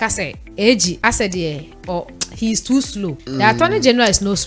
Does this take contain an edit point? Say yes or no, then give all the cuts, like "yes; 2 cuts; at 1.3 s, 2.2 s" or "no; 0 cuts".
yes; 2 cuts; at 1.0 s, 3.2 s